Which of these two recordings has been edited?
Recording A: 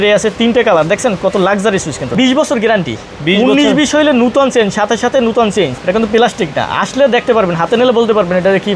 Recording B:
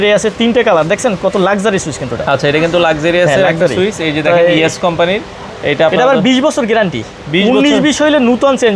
A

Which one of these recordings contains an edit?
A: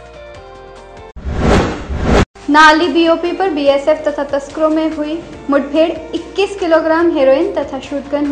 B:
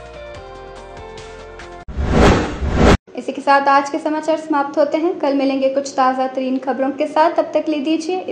A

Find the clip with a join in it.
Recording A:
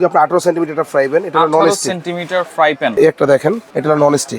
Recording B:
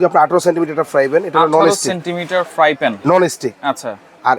A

